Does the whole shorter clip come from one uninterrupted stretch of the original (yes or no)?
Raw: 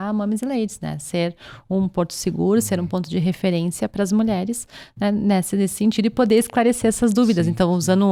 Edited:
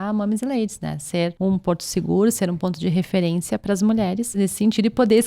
no